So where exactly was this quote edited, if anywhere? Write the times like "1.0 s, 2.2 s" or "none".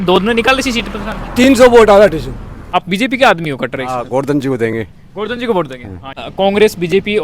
2.6 s, 6.2 s